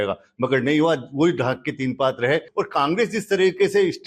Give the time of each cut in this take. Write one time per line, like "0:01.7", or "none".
0:02.5